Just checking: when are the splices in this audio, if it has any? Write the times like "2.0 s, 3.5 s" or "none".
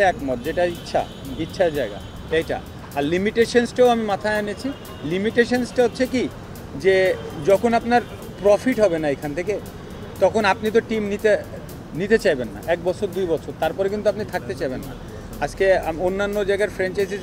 none